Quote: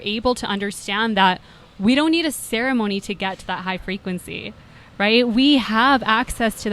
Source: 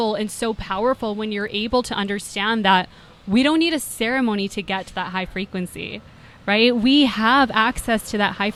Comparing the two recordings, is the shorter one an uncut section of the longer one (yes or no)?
yes